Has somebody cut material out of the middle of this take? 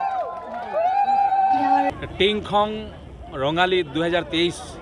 yes; 1 cut; at 2.0 s

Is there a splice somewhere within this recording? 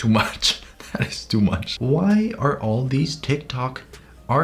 yes; 1 cut; at 1.7 s

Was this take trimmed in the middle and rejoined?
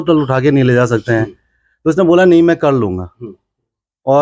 no; 0 cuts

